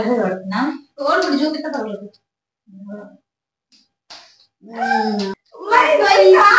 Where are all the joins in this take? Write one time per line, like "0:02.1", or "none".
0:05.4